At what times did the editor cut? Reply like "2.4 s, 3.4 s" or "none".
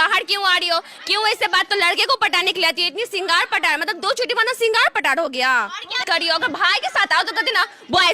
1.7 s, 6.0 s